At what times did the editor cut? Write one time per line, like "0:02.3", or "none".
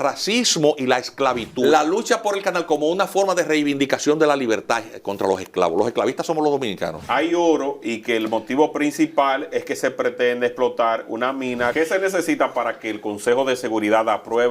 0:01.5
0:07.0
0:11.7